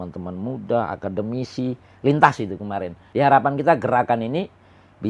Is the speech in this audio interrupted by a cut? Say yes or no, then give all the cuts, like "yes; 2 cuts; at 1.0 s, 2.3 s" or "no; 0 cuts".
yes; 1 cut; at 3.0 s